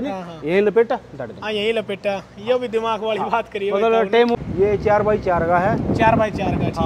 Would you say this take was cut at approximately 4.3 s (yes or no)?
yes